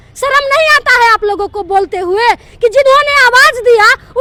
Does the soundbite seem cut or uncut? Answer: uncut